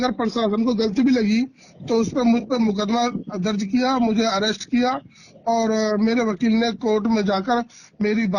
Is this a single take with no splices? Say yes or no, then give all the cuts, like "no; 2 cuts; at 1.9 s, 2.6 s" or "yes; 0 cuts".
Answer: yes; 0 cuts